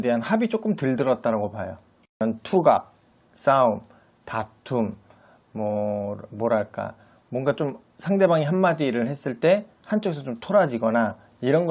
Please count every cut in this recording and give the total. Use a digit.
1